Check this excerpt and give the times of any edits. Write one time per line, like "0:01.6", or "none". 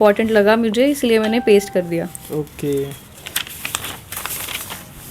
none

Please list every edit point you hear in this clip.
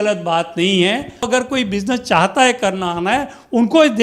0:01.3

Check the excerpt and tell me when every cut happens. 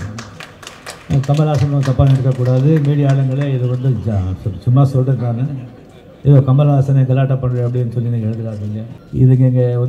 0:08.9

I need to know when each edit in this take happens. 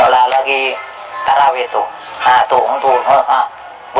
none

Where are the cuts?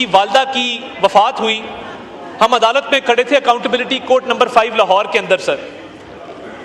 none

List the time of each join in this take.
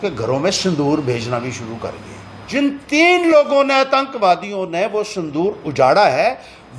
0:02.5

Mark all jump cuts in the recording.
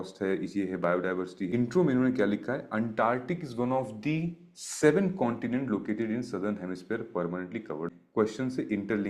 0:01.5
0:07.9

